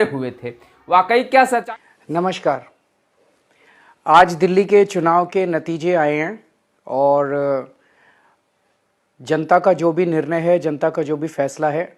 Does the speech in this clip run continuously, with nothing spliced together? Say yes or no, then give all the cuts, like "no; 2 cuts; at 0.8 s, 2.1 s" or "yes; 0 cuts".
no; 1 cut; at 1.6 s